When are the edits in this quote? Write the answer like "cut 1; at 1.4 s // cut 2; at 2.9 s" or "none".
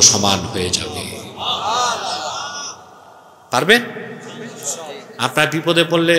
none